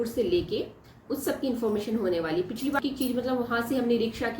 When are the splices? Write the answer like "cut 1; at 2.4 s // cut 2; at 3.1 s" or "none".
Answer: cut 1; at 2.8 s